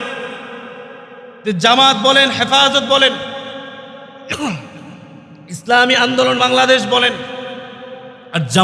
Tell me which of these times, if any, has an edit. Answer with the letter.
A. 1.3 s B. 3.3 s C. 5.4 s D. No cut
D